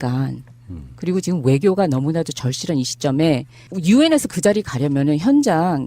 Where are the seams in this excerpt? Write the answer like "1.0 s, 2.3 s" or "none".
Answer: 1.9 s